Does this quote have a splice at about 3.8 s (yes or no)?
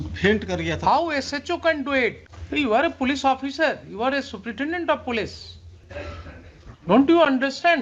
no